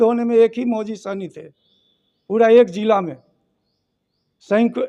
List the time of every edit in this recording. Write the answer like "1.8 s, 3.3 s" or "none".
none